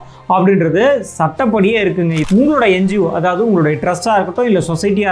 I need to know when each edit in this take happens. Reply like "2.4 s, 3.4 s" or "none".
2.2 s